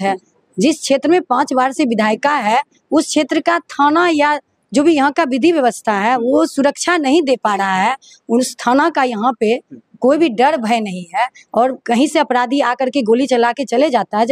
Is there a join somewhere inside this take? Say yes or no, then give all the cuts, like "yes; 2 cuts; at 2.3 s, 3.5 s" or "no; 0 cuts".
no; 0 cuts